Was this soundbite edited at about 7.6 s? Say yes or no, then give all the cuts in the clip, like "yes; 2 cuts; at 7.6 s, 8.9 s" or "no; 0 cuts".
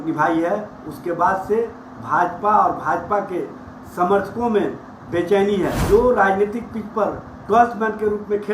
no; 1 cut; at 5.8 s